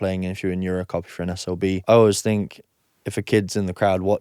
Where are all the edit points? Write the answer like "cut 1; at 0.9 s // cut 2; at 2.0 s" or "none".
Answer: cut 1; at 1.8 s